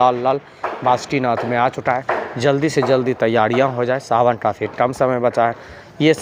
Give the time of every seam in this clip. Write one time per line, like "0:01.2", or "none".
none